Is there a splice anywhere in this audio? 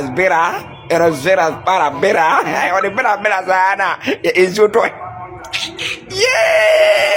no; 0 cuts

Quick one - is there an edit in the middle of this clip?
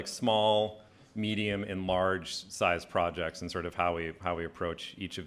no; 0 cuts

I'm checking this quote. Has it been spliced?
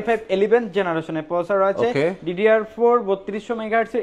no; 0 cuts

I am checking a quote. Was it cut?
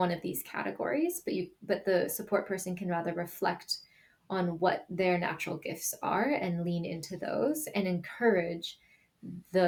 no; 0 cuts

